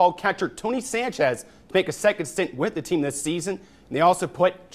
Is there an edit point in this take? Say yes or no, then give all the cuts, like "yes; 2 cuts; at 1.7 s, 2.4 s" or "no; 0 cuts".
no; 0 cuts